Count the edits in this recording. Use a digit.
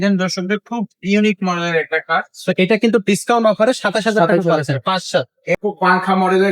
1